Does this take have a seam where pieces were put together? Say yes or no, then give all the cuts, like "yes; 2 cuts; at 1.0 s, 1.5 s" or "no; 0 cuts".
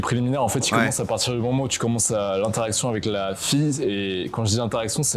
no; 0 cuts